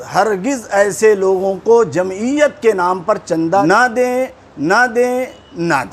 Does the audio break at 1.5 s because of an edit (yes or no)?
no